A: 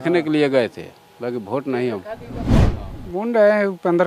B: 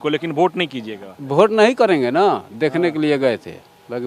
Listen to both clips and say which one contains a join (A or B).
A